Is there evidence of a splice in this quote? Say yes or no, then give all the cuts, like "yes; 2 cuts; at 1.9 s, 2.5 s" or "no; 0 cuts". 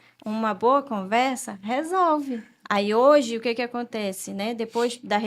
yes; 1 cut; at 2.5 s